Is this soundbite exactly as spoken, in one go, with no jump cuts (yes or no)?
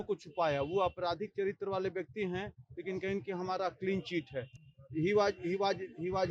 yes